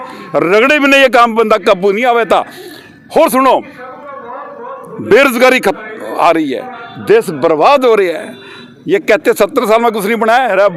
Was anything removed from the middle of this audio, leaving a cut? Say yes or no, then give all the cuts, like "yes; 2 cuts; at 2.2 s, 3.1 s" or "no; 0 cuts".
no; 0 cuts